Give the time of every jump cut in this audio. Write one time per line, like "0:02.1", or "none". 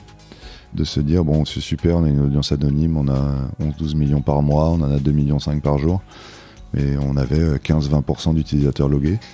none